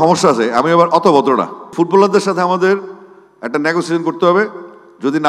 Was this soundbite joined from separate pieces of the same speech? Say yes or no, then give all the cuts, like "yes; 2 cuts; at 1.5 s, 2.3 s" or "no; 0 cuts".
yes; 1 cut; at 1.6 s